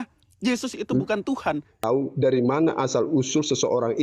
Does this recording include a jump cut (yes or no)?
yes